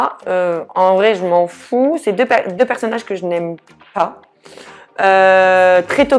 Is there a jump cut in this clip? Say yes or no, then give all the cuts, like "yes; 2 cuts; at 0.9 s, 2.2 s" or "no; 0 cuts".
no; 0 cuts